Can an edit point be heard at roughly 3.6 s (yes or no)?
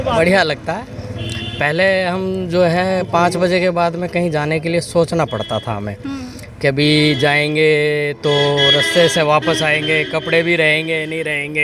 no